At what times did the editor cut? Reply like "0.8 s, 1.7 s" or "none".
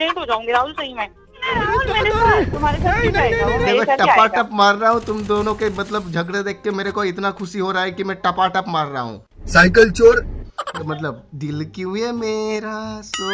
1.4 s, 10.7 s